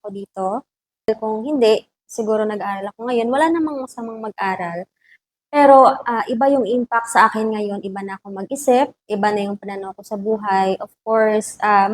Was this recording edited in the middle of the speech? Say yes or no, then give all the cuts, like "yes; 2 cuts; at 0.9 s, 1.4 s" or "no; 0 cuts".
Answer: yes; 1 cut; at 1.1 s